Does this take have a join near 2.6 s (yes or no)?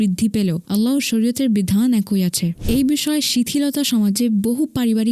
yes